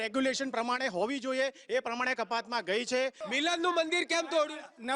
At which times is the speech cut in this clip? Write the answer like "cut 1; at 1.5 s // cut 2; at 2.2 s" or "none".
cut 1; at 3.2 s

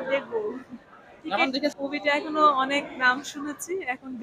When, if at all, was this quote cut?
cut 1; at 1.8 s

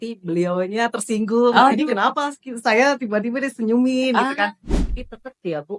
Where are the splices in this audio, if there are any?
cut 1; at 4.8 s

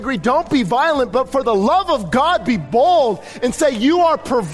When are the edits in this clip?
none

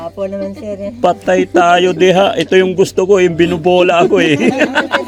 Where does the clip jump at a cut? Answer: none

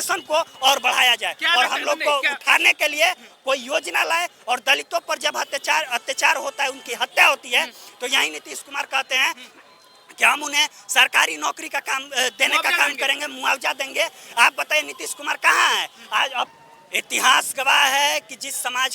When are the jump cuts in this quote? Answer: cut 1; at 16.6 s

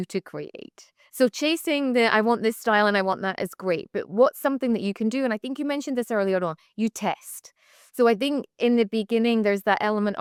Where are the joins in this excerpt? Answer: none

